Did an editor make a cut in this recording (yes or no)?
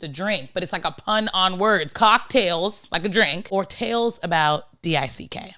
yes